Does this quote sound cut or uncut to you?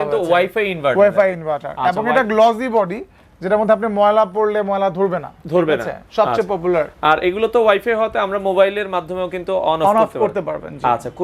uncut